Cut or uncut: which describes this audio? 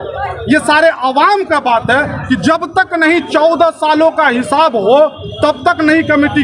uncut